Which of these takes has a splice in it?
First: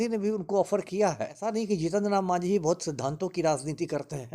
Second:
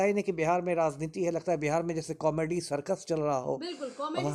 first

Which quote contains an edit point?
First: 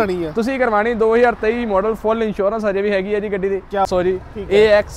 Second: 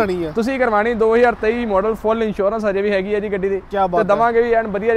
first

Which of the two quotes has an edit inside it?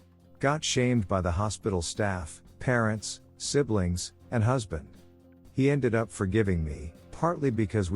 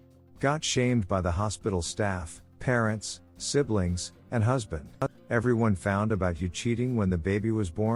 first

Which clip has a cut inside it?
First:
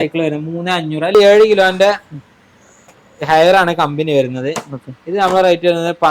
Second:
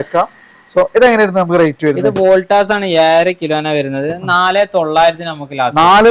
first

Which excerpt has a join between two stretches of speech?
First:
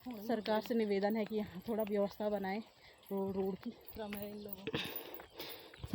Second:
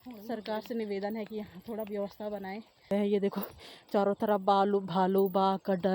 second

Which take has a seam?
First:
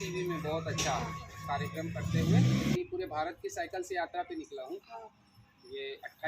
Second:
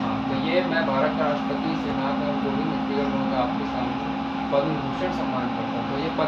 first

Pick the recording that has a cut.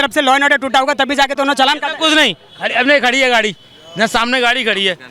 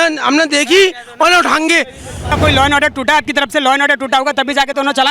second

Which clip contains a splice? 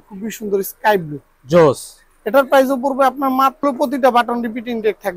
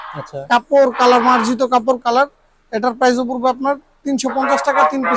first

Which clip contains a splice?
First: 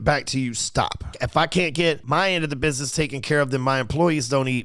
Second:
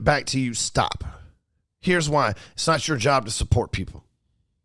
first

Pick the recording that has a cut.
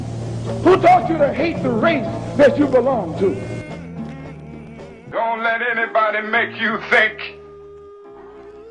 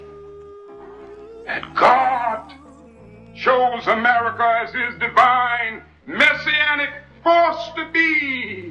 first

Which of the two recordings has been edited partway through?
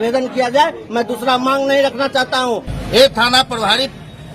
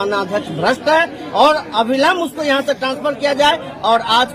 first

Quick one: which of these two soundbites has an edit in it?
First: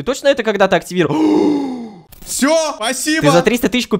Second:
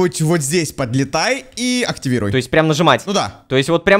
first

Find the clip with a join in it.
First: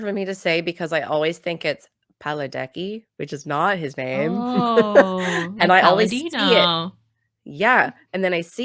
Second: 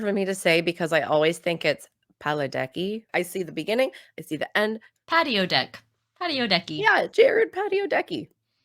second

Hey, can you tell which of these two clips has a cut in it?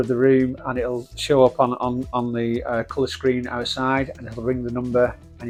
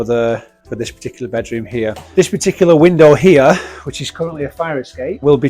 second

